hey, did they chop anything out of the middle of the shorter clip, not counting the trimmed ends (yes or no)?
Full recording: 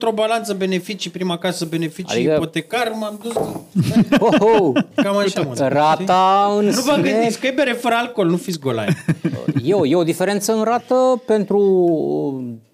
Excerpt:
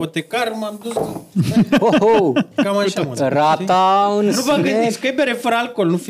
no